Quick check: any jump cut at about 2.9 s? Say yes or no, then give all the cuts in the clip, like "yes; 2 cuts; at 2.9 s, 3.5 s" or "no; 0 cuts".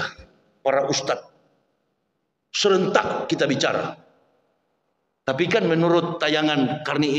no; 0 cuts